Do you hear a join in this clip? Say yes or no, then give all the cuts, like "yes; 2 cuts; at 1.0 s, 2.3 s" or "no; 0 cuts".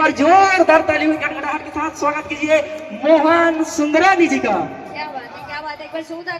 no; 0 cuts